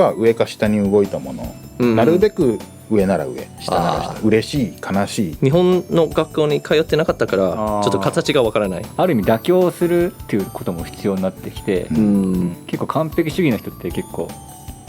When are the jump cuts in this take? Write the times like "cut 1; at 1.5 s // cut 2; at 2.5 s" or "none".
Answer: cut 1; at 5.3 s // cut 2; at 8.8 s